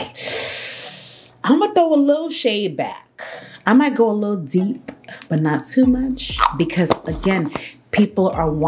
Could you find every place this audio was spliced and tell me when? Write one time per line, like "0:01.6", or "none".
none